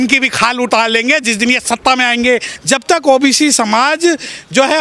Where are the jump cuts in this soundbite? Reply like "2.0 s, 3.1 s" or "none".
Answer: 2.5 s